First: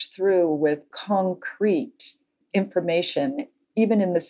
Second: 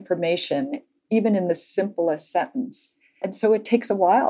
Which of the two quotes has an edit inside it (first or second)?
first